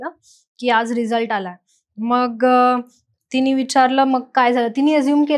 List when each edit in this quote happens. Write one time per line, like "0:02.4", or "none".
none